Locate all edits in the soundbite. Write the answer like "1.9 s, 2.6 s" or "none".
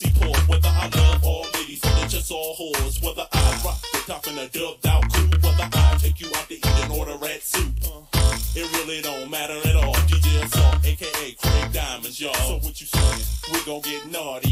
1.1 s